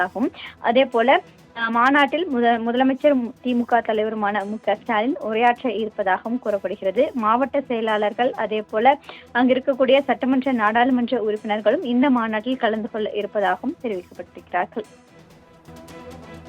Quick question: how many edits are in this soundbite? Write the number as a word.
one